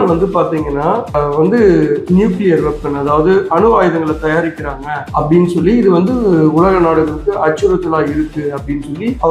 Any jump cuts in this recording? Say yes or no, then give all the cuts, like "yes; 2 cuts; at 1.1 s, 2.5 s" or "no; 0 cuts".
no; 0 cuts